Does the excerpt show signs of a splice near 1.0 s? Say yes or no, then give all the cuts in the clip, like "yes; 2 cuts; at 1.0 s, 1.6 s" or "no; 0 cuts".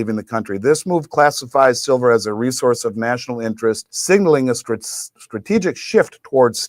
no; 1 cut; at 3.9 s